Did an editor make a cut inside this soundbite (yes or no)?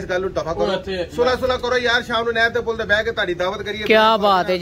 no